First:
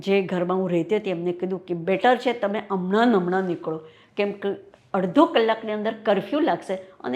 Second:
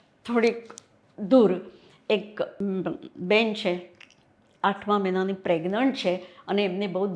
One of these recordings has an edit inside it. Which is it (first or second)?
second